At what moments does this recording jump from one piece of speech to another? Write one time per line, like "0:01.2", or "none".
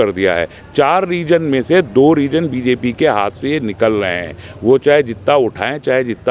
none